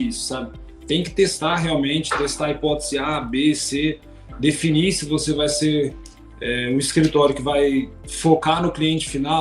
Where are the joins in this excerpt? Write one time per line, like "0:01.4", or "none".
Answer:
0:08.0